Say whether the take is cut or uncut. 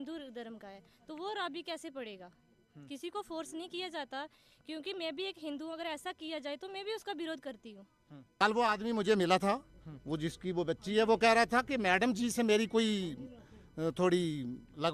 cut